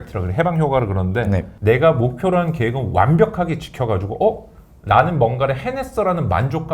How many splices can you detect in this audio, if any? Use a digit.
1